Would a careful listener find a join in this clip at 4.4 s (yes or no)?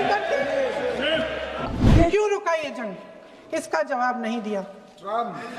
no